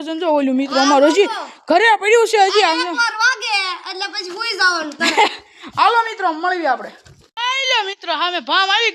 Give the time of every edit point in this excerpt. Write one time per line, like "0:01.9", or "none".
none

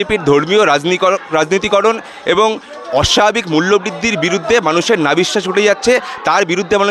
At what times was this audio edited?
none

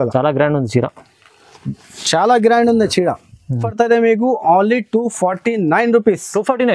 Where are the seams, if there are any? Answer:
0:03.6

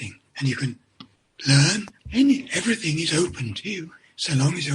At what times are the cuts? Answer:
0:02.0

